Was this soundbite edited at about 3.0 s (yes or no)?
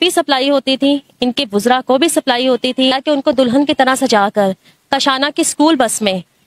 yes